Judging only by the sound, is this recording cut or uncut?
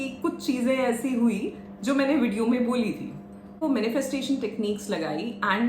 cut